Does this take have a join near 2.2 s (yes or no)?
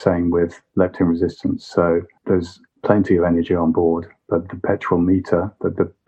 yes